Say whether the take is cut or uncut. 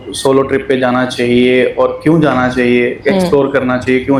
uncut